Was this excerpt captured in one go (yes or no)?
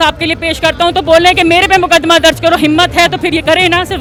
yes